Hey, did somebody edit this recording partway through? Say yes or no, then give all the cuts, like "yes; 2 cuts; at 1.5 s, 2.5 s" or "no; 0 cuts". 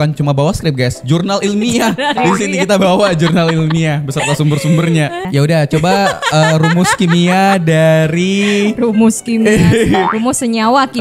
yes; 1 cut; at 5.3 s